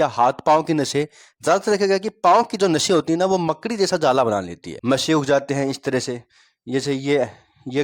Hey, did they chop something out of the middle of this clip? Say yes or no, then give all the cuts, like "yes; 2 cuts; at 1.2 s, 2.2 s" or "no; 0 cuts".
yes; 1 cut; at 4.7 s